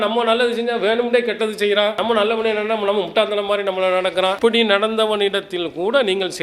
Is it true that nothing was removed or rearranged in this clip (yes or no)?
yes